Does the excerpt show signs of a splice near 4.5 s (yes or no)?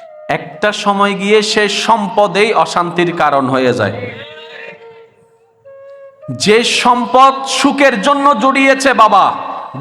yes